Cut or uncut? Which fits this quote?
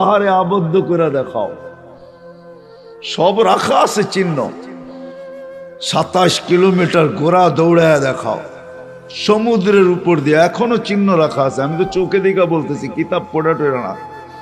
cut